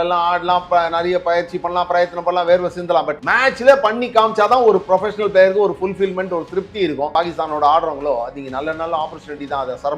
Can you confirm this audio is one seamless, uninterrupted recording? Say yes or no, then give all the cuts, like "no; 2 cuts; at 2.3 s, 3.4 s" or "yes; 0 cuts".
no; 2 cuts; at 3.2 s, 7.1 s